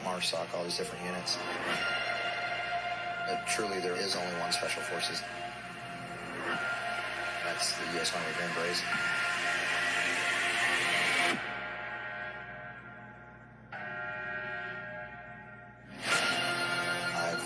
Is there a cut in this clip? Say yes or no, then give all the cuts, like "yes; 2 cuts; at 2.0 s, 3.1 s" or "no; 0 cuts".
no; 0 cuts